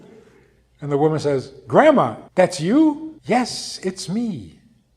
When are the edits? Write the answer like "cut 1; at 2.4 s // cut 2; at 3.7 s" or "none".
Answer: cut 1; at 2.2 s // cut 2; at 3.1 s